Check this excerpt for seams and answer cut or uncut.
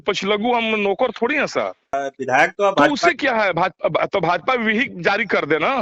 cut